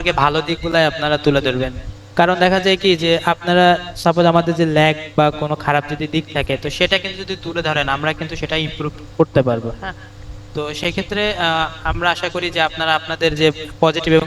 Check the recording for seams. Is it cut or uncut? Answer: uncut